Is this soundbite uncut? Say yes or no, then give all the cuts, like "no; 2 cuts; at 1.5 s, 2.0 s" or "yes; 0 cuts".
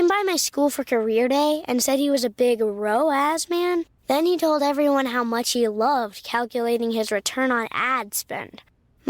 yes; 0 cuts